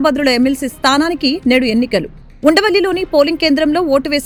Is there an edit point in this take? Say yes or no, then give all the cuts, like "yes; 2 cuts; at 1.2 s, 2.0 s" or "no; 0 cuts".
no; 0 cuts